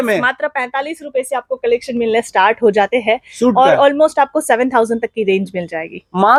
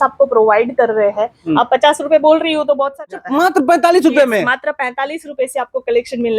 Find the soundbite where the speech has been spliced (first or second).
second